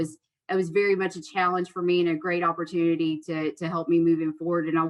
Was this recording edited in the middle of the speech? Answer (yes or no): no